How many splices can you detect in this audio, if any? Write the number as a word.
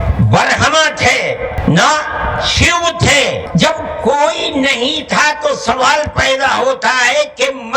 two